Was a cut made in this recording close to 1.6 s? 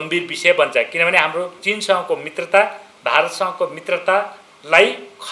yes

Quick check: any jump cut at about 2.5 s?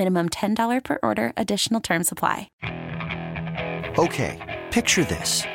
yes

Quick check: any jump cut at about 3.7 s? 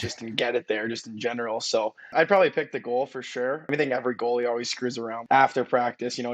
yes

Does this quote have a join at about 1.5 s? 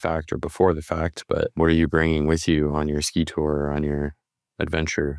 yes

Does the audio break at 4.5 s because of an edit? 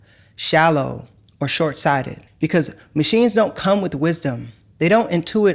no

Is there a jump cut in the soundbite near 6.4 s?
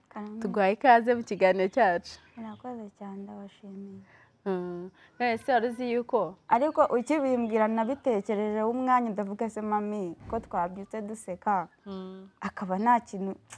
yes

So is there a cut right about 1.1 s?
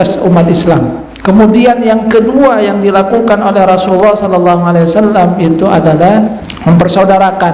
yes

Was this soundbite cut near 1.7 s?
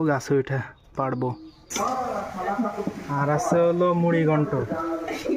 yes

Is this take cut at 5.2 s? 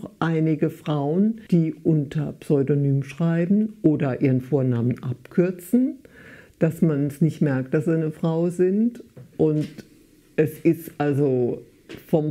no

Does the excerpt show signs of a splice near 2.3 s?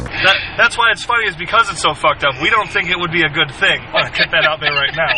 no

